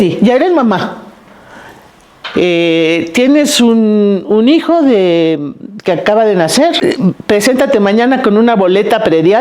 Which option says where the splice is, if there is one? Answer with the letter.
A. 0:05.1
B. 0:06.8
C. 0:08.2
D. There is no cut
B